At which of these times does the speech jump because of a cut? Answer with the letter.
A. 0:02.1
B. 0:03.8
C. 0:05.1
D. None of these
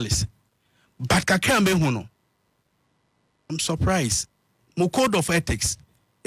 D